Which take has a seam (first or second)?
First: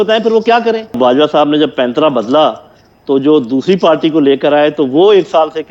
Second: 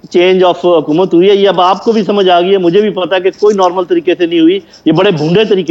first